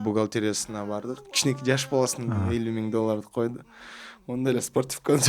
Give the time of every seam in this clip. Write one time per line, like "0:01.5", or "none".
0:01.3